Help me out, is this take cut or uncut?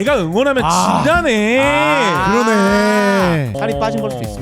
cut